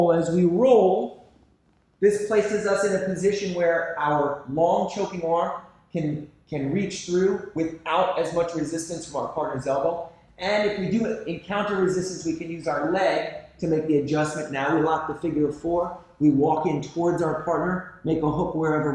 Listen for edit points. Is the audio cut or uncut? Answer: uncut